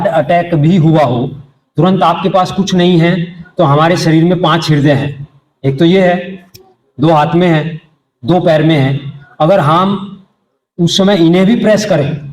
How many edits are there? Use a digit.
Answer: 0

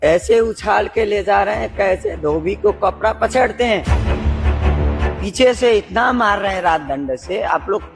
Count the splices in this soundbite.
0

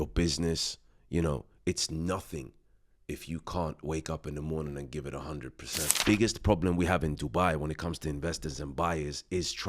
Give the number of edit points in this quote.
1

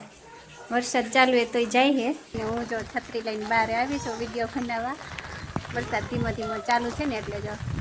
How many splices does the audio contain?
1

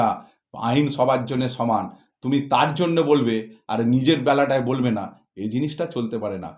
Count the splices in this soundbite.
0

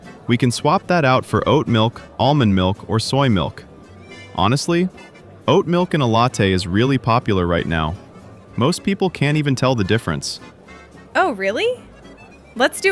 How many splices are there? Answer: 1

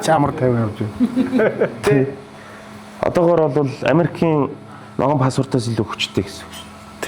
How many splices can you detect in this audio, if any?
0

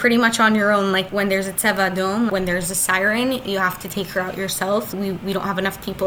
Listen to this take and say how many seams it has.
3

